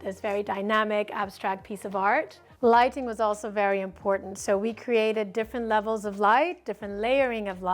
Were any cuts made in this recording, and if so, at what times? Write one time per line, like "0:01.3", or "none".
none